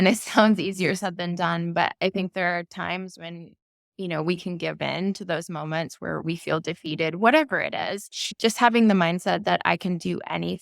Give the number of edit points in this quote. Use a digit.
1